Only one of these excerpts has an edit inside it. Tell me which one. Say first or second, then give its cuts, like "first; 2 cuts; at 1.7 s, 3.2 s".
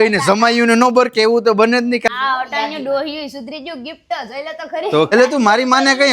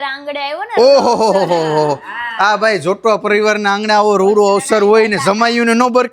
first; 2 cuts; at 2.1 s, 5.1 s